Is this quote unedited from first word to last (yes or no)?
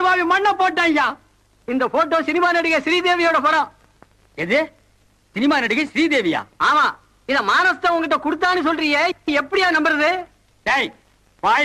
no